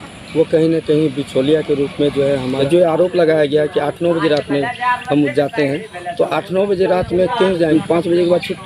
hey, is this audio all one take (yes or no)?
no